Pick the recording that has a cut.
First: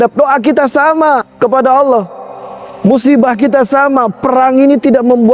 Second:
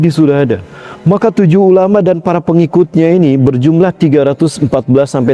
first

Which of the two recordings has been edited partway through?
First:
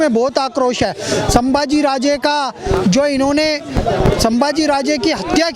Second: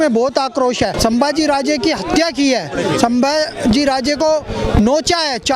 second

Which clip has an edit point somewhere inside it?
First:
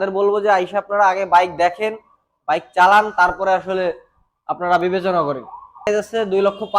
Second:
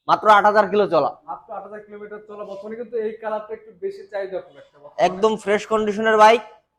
first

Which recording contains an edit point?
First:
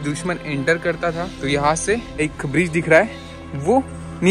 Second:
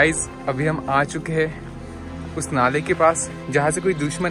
first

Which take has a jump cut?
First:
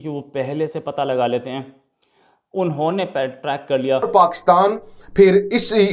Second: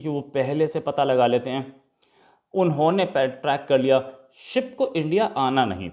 first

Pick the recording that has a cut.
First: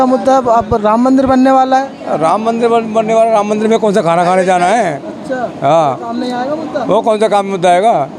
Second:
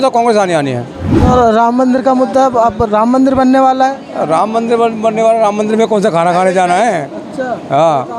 second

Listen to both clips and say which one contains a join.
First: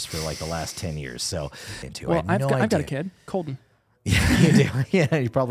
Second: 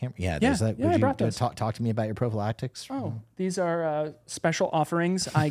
first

